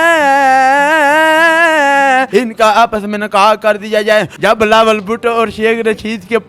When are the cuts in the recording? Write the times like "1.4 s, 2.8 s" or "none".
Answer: 2.3 s, 4.3 s